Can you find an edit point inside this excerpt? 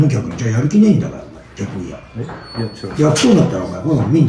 no; 0 cuts

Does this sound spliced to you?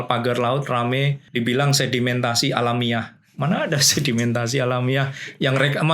yes; 1 cut; at 1.2 s

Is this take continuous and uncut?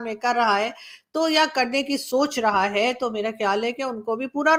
yes; 0 cuts

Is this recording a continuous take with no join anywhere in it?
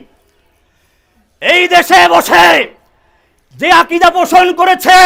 yes; 0 cuts

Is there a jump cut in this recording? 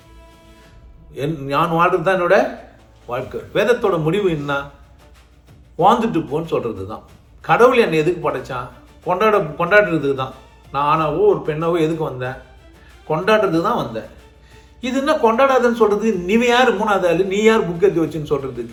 no; 0 cuts

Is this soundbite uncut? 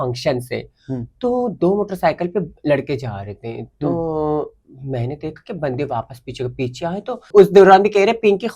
no; 1 cut; at 7.2 s

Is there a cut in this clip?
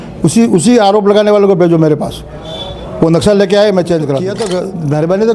yes; 1 cut; at 4.2 s

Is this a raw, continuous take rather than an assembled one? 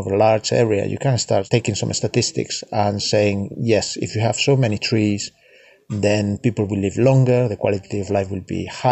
no; 1 cut; at 1.5 s

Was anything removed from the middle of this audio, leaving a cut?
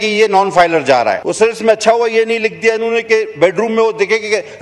yes; 1 cut; at 1.2 s

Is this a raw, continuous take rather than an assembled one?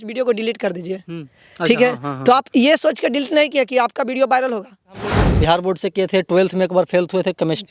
no; 1 cut; at 5.3 s

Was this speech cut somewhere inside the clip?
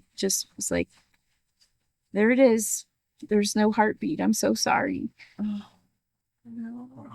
no; 0 cuts

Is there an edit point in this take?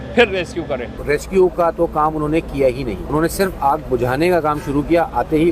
yes; 2 cuts; at 1.0 s, 3.0 s

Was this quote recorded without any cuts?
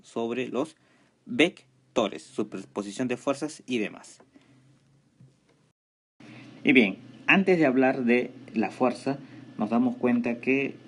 yes; 0 cuts

